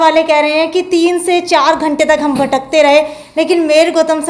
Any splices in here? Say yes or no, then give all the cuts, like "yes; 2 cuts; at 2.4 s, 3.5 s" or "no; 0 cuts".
no; 0 cuts